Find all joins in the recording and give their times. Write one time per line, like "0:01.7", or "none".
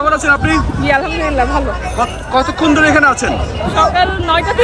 none